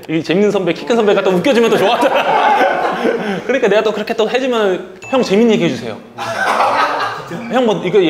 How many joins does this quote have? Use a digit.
0